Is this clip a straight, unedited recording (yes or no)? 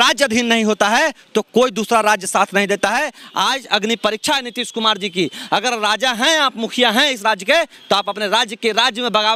yes